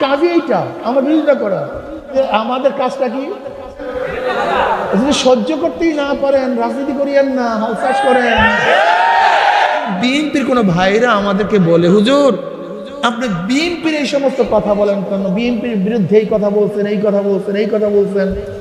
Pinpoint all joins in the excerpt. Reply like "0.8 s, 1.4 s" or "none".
2.1 s, 4.0 s, 9.9 s